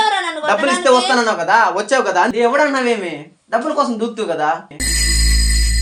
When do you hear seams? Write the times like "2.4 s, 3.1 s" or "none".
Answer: 2.3 s, 4.7 s

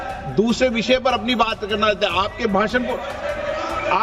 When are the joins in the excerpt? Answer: none

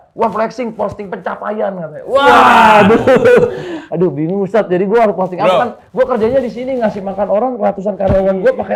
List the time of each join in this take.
none

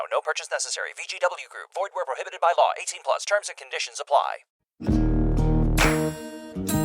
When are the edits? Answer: 4.8 s

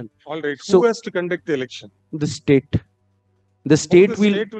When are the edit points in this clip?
none

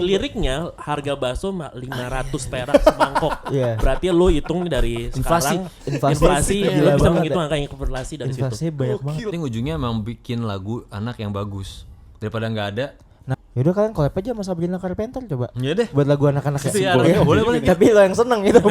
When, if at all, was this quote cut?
9.3 s, 13.3 s

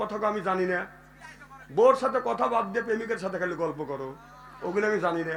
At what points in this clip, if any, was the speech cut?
none

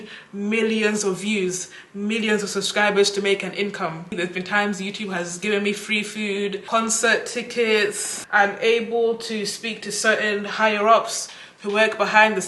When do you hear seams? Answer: 4.1 s, 6.6 s, 8.1 s

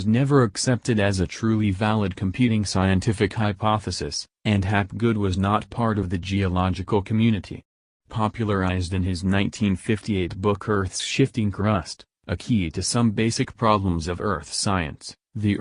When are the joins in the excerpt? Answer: 1.3 s

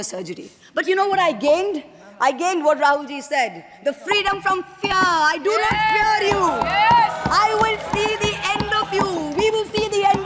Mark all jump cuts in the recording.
none

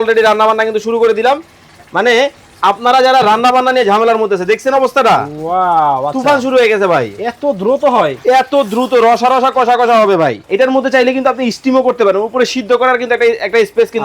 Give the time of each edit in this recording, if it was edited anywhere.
10.4 s

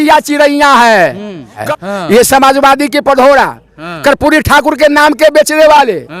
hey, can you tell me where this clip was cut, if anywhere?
1.6 s

